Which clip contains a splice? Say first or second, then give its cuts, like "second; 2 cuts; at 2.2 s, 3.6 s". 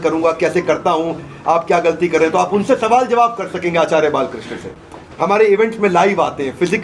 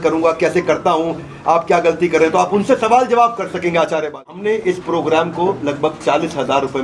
second; 1 cut; at 4.3 s